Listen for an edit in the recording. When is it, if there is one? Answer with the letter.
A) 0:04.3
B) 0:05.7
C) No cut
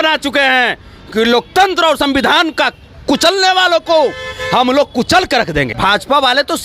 B